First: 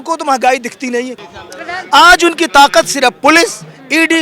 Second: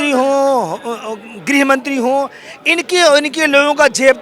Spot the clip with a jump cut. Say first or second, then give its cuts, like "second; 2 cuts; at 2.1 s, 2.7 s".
first; 1 cut; at 1.1 s